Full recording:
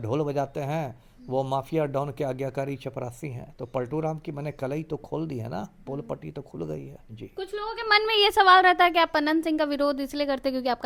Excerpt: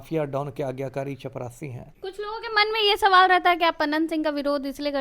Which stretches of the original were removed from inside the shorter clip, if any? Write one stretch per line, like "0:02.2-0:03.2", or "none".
0:03.5-0:07.2